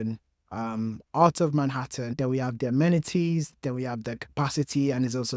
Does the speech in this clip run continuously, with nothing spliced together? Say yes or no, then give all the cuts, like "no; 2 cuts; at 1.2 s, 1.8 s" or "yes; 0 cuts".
yes; 0 cuts